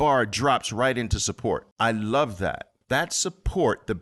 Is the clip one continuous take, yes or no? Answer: no